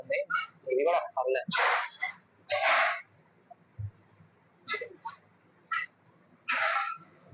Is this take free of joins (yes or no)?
yes